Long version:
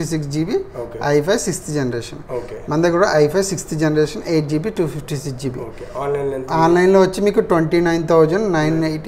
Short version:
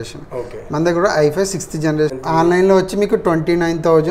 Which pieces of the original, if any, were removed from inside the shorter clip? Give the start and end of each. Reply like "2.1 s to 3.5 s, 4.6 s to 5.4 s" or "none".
4.2 s to 6.4 s